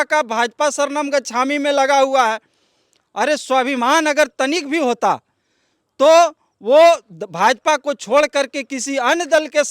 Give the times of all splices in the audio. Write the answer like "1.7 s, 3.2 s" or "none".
none